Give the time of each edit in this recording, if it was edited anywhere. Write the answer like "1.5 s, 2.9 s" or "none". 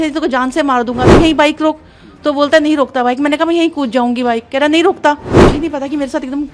1.1 s, 5.4 s